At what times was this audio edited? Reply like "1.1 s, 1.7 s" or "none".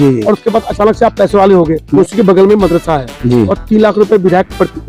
1.9 s